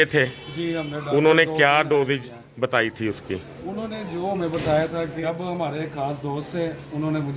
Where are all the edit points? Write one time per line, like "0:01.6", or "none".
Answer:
0:05.2